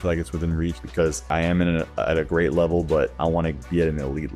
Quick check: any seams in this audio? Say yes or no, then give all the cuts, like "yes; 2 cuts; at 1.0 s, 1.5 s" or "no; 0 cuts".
yes; 1 cut; at 1.3 s